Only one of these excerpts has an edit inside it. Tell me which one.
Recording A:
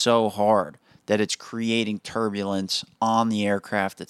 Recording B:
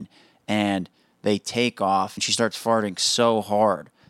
B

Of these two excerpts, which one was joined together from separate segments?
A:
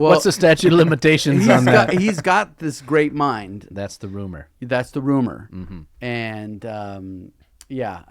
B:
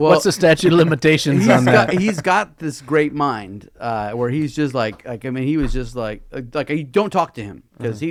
A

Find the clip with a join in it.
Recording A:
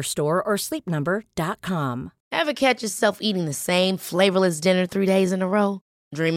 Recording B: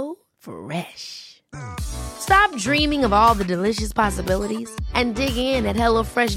A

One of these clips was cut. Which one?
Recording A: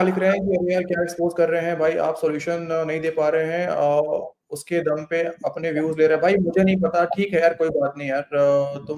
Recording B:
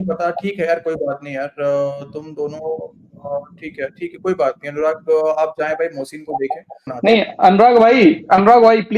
B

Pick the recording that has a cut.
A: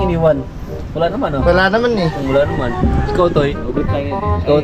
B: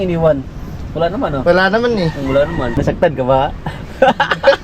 B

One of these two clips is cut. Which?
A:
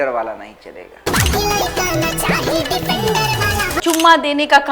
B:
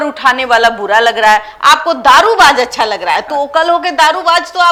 A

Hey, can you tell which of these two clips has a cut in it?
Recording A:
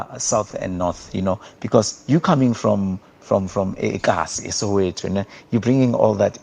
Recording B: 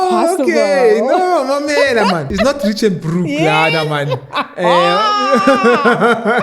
B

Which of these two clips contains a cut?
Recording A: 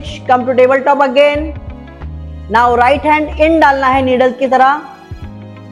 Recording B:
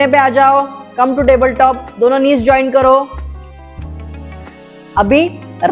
B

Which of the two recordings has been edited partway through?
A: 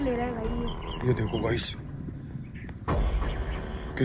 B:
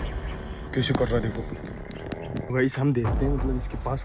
B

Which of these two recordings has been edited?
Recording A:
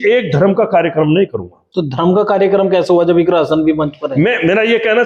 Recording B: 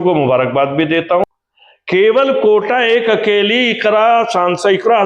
B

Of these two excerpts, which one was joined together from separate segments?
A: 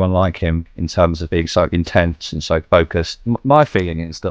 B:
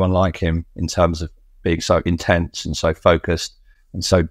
A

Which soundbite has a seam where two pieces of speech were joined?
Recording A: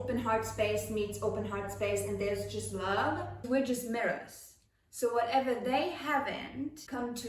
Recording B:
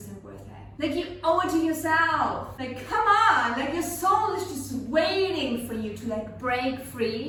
A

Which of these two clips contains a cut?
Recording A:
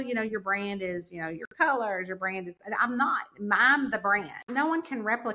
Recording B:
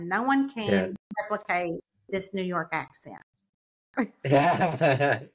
A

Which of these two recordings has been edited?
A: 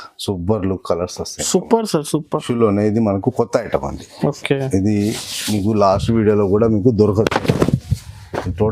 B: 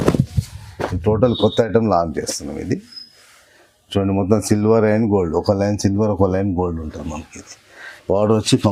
A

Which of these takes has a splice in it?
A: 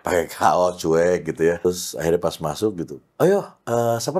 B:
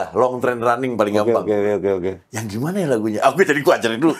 A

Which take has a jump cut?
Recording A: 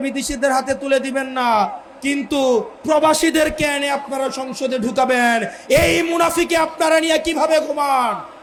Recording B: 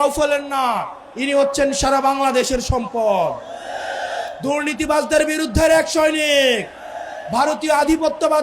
B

